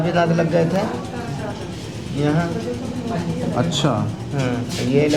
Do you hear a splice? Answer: no; 0 cuts

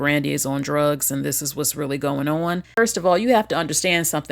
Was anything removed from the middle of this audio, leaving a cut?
yes; 1 cut; at 2.7 s

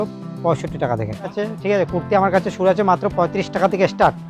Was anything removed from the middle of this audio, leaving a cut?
yes; 1 cut; at 1.3 s

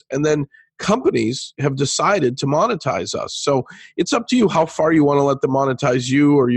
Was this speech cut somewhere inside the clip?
no; 0 cuts

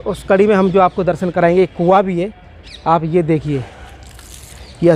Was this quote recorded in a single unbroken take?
yes; 0 cuts

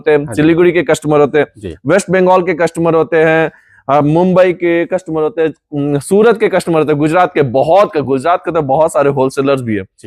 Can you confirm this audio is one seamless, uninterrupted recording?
yes; 0 cuts

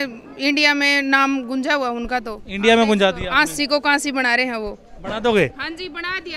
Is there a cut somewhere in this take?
no; 0 cuts

